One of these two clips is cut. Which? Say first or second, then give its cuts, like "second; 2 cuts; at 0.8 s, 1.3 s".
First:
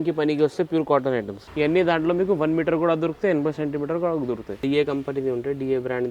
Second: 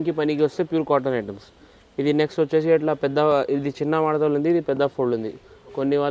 first; 2 cuts; at 1.4 s, 4.6 s